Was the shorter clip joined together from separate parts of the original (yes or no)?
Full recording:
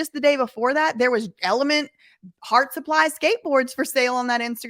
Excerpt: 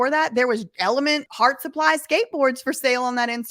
yes